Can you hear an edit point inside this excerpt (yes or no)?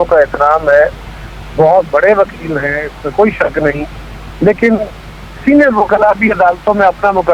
no